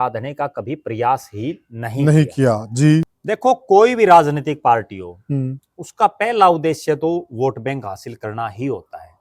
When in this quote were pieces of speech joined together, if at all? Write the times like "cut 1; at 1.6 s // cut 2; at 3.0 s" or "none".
cut 1; at 3.1 s